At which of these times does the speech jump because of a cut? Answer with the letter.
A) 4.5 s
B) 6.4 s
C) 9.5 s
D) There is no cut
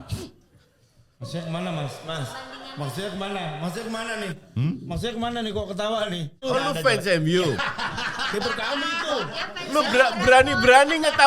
B